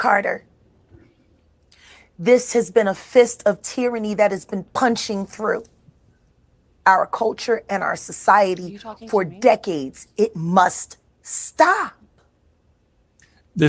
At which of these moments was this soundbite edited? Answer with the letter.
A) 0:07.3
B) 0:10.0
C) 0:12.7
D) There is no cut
B